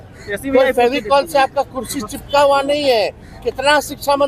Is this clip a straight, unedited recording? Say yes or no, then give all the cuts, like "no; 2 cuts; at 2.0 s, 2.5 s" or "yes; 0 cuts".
yes; 0 cuts